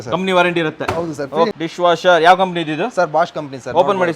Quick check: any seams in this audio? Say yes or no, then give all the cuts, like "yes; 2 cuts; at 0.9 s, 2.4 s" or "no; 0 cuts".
yes; 1 cut; at 1.5 s